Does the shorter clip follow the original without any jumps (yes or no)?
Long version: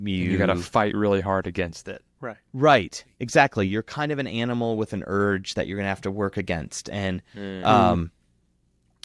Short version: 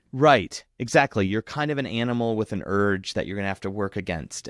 yes